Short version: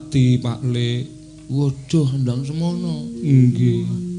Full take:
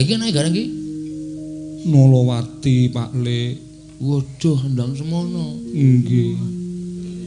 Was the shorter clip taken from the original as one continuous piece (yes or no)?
yes